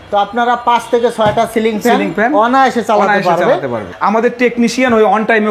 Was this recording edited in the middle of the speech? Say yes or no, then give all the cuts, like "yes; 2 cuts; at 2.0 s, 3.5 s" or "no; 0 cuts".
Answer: yes; 1 cut; at 3.9 s